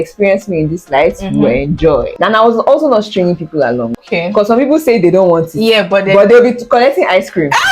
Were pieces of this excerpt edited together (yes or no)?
yes